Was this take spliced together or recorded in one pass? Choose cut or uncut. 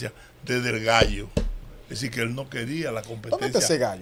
uncut